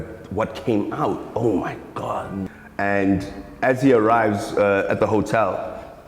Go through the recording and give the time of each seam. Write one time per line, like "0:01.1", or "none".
0:02.5